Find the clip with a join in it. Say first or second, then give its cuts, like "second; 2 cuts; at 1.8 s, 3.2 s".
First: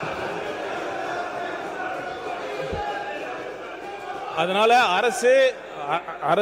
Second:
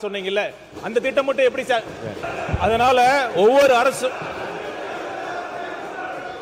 second; 1 cut; at 2.2 s